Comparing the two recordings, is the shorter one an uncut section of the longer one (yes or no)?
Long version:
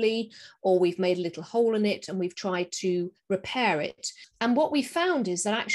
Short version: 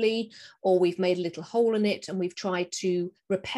yes